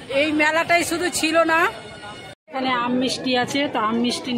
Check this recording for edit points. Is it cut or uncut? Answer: cut